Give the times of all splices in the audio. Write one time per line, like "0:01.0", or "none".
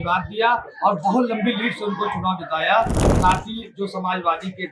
0:03.0